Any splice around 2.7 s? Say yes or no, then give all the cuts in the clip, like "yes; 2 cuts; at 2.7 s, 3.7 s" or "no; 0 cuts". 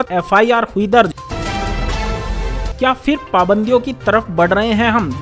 yes; 2 cuts; at 1.2 s, 2.7 s